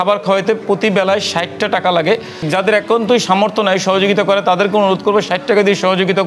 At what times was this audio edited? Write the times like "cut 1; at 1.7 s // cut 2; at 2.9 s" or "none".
none